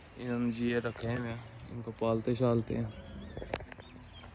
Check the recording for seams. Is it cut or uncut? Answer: uncut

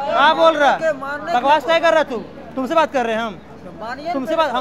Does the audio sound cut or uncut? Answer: uncut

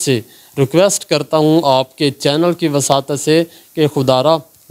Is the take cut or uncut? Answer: uncut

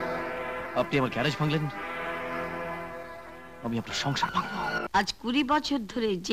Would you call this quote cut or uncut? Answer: cut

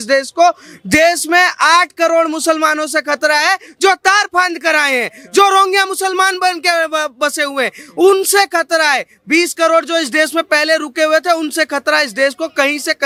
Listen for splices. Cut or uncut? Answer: uncut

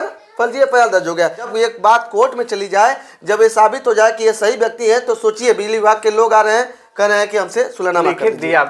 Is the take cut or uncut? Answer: cut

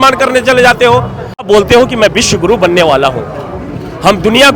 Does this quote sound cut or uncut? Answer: cut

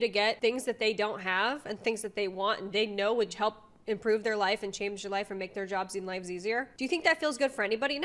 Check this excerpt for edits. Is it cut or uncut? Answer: uncut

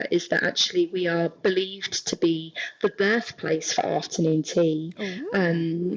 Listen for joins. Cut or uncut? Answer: uncut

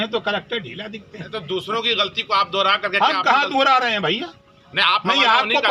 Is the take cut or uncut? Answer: uncut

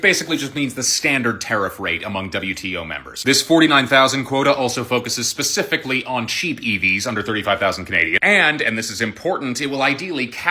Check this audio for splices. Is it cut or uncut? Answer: uncut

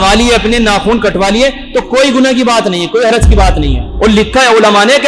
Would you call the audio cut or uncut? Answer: cut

